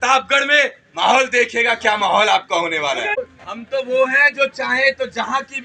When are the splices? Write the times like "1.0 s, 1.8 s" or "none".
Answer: 3.2 s